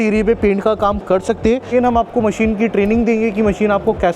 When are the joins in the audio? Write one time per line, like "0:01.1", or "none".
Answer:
0:01.7